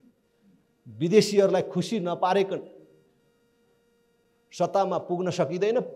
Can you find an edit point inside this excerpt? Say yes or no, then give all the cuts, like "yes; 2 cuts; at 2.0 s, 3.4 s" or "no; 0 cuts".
no; 0 cuts